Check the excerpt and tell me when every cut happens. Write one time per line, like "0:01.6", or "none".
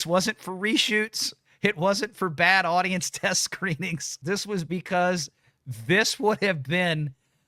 0:04.1